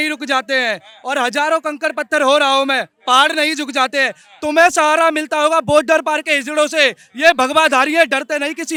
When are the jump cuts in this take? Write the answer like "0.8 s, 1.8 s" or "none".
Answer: none